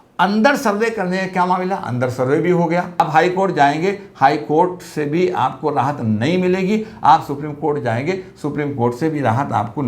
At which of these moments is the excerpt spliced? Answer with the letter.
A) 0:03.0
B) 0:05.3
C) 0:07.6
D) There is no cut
A